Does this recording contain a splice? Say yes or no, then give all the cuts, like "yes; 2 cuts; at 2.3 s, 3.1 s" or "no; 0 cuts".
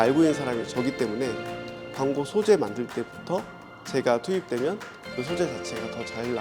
no; 0 cuts